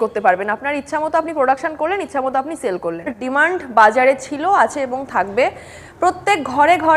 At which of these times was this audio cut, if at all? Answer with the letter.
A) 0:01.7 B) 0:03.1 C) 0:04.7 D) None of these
B